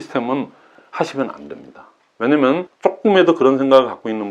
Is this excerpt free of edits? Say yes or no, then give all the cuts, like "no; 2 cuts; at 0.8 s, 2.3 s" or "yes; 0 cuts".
no; 1 cut; at 2.7 s